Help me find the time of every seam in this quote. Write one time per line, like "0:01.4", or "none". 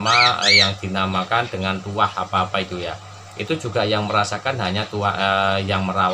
none